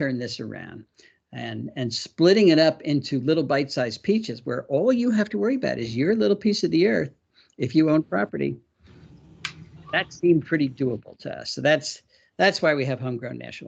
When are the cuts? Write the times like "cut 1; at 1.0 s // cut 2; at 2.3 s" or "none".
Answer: none